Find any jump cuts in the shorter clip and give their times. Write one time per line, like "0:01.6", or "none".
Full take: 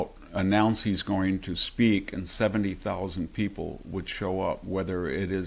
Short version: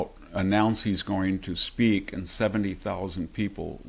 none